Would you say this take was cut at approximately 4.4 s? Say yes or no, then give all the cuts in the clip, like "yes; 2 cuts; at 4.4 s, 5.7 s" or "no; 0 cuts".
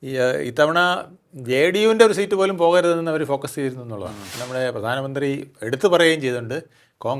yes; 1 cut; at 4.4 s